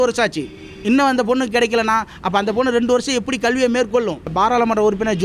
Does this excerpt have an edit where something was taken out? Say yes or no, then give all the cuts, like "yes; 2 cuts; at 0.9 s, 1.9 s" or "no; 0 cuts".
yes; 1 cut; at 4.3 s